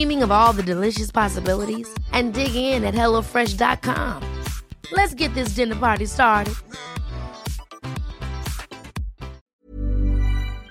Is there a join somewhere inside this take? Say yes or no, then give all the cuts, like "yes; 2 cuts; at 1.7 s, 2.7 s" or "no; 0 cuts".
yes; 1 cut; at 9.5 s